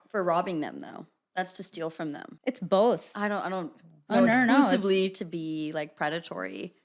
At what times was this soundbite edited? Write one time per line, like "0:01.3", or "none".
0:02.3